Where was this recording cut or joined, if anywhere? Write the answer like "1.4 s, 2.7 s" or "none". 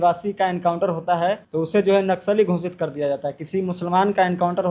1.4 s